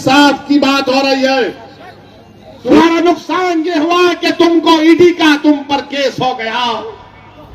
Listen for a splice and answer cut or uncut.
cut